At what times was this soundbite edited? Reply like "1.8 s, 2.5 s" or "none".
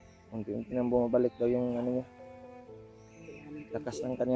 2.1 s, 3.4 s